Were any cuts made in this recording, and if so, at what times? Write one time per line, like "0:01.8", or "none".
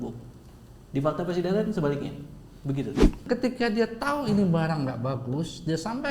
0:03.2